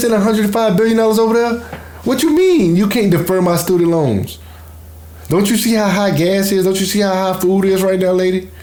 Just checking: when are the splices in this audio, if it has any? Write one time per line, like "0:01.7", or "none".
none